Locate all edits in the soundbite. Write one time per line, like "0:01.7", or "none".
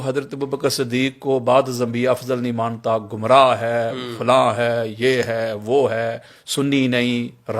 none